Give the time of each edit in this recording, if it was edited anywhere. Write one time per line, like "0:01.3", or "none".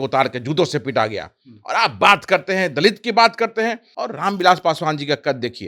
0:03.9